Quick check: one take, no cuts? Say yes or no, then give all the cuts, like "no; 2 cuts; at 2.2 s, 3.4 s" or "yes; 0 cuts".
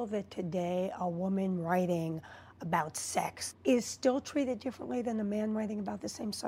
no; 1 cut; at 3.5 s